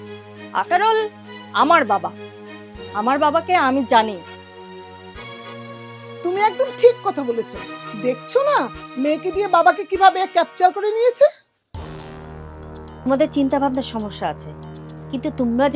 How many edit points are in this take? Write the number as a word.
two